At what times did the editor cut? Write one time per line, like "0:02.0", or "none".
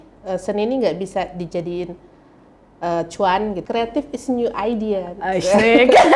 0:03.6